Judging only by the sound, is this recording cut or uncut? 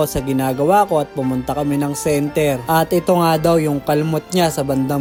uncut